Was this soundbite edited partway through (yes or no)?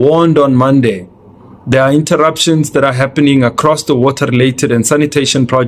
no